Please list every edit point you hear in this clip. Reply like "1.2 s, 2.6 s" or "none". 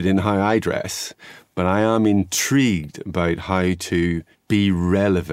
4.3 s